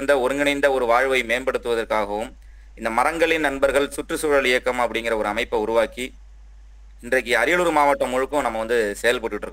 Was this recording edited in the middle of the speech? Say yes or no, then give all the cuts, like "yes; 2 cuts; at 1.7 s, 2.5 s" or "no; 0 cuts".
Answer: no; 0 cuts